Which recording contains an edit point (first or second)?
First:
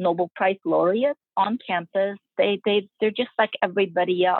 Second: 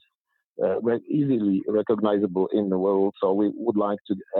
first